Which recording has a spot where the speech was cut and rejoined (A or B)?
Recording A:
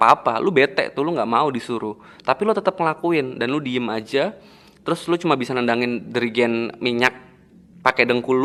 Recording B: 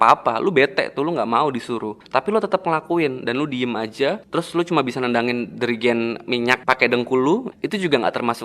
B